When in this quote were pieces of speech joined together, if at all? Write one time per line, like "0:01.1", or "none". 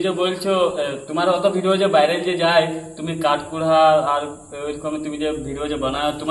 none